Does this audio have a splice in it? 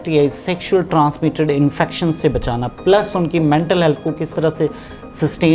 no; 0 cuts

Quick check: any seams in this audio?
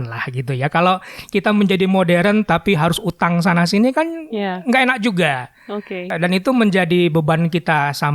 yes; 1 cut; at 6.1 s

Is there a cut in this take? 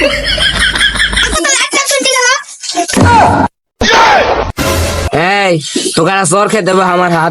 yes; 1 cut; at 5.0 s

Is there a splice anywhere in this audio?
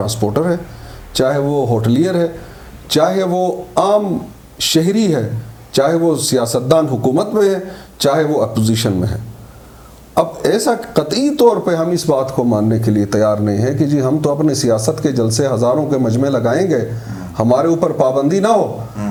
no; 0 cuts

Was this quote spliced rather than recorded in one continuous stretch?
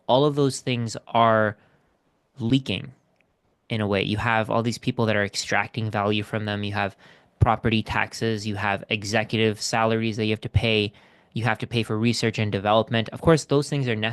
no; 0 cuts

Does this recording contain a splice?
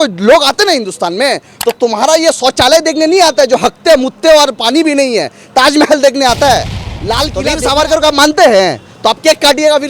yes; 1 cut; at 7.4 s

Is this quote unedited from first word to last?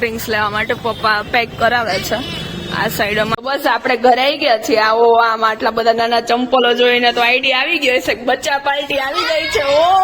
no; 1 cut; at 3.4 s

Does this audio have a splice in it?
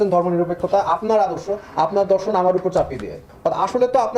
yes; 1 cut; at 3.3 s

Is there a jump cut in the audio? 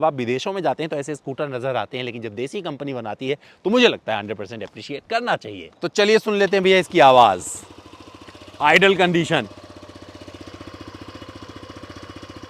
no; 0 cuts

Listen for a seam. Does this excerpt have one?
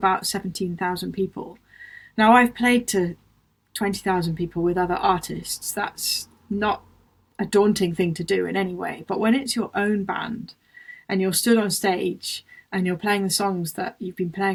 no; 0 cuts

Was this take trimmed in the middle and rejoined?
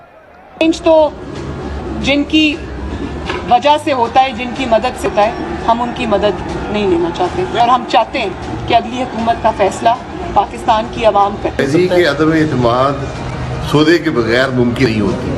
no; 0 cuts

